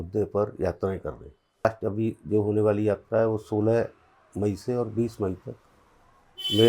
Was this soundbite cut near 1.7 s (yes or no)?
yes